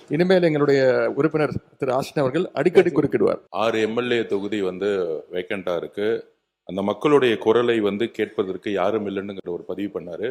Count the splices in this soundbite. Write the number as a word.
one